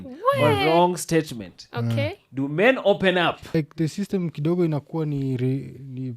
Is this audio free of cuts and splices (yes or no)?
no